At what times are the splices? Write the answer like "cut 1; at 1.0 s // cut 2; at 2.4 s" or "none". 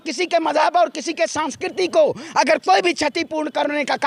none